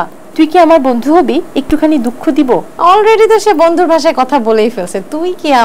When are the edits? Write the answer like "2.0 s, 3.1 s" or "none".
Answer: 2.7 s

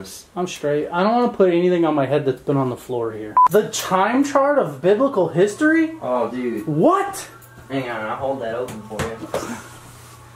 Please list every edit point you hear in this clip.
3.4 s

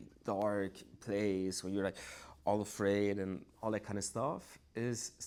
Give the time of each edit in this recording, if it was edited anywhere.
none

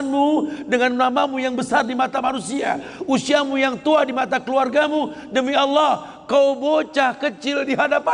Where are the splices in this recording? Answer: none

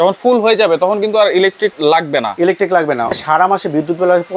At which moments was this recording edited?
1.7 s, 3.1 s

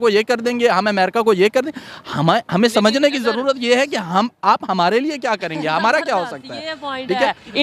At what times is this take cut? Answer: none

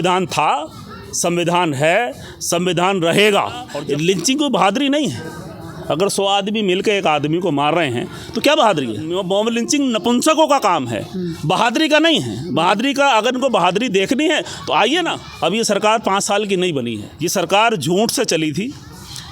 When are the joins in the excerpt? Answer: 3.7 s, 9.1 s, 15.3 s, 17.0 s

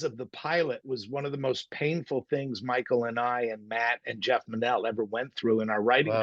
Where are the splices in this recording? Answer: none

